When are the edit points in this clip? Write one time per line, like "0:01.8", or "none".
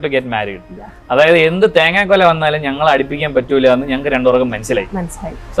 none